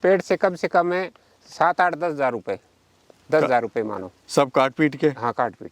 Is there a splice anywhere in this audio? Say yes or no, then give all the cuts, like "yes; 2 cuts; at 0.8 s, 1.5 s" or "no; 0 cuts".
no; 0 cuts